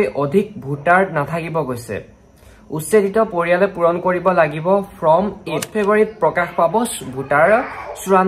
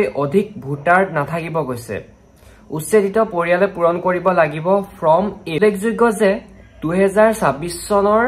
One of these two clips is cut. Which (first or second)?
first